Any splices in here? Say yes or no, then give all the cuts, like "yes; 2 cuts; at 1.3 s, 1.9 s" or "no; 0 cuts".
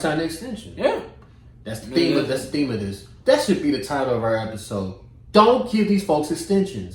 no; 0 cuts